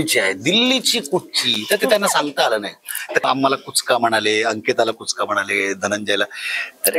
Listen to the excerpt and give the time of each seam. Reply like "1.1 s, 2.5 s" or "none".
3.2 s